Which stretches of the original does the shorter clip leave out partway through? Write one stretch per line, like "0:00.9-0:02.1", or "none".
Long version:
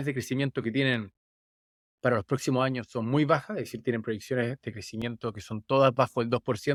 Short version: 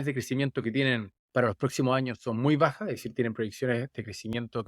0:01.2-0:01.8